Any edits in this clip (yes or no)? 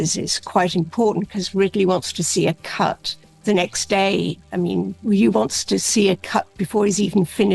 no